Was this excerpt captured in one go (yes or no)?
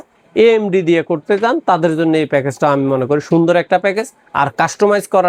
yes